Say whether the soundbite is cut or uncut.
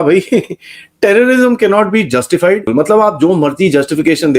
cut